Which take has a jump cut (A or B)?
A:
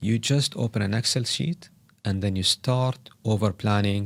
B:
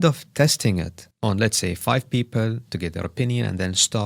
B